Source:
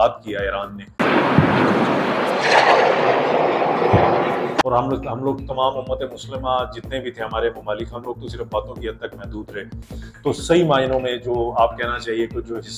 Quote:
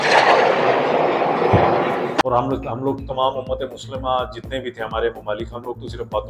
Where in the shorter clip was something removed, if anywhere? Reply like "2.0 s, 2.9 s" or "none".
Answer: none